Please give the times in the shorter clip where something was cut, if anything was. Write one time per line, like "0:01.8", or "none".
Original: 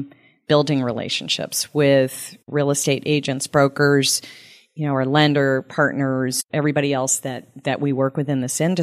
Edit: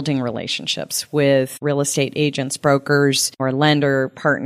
0:01.5
0:03.3